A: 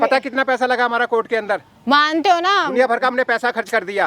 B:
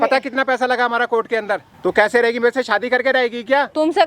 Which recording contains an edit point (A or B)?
B